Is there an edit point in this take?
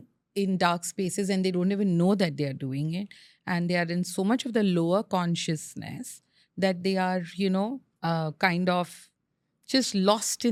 no; 0 cuts

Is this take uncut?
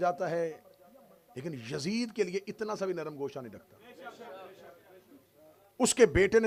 yes; 0 cuts

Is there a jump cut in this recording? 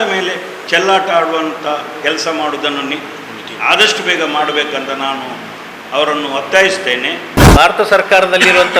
yes; 1 cut; at 7.3 s

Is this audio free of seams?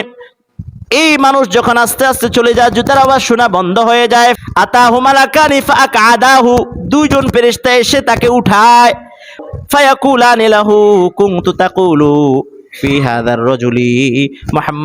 no; 2 cuts; at 4.4 s, 9.4 s

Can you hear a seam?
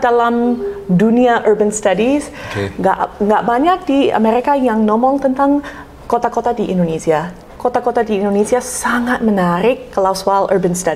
yes; 1 cut; at 7.4 s

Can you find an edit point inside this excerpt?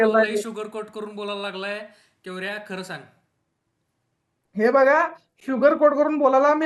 no; 0 cuts

